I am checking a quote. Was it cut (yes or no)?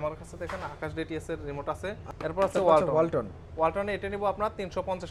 yes